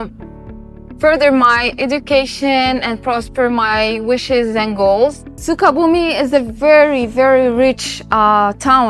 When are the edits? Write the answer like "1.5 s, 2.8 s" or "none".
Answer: 5.4 s